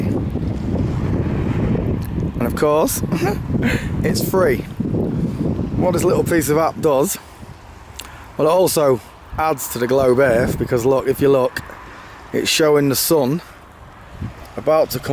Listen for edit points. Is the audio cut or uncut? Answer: uncut